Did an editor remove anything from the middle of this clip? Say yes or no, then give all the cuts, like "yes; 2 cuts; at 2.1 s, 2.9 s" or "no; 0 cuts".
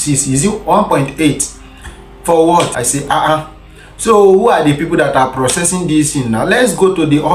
yes; 1 cut; at 2.8 s